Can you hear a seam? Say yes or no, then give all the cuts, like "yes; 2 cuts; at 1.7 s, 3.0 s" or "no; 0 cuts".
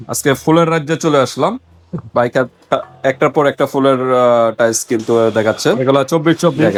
no; 0 cuts